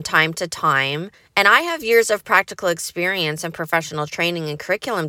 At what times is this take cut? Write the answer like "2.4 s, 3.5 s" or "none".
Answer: 1.2 s